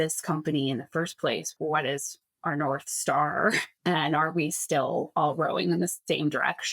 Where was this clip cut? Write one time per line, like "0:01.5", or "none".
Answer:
0:01.5
0:03.7